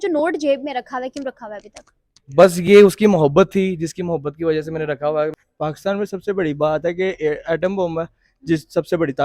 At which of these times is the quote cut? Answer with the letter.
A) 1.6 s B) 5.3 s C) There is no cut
B